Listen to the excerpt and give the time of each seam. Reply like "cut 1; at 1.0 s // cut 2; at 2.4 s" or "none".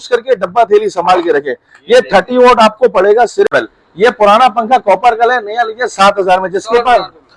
cut 1; at 3.5 s